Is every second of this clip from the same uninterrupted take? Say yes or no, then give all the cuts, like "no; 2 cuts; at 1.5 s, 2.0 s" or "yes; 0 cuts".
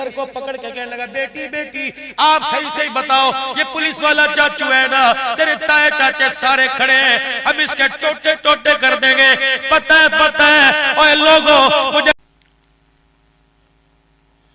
no; 1 cut; at 12.1 s